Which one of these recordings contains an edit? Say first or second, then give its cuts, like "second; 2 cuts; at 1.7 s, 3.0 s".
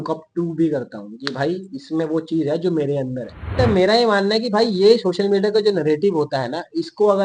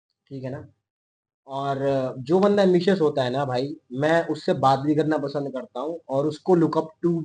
first; 1 cut; at 3.5 s